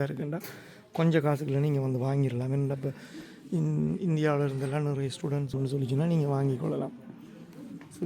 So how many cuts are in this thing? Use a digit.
1